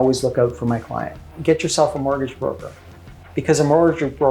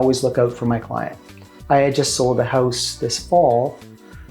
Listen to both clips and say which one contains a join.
first; 1 cut; at 1.3 s

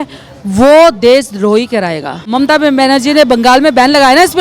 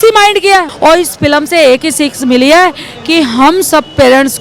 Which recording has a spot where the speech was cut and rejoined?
first; 1 cut; at 2.3 s

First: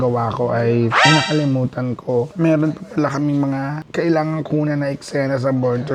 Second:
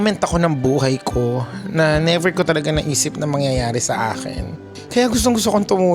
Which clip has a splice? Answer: first; 1 cut; at 1.0 s

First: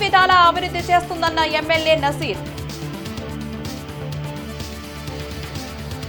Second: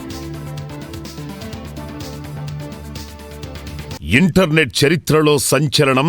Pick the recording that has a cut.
second; 1 cut; at 3.9 s

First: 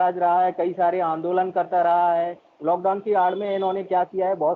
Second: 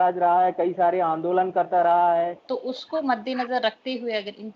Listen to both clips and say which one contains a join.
second; 1 cut; at 2.4 s

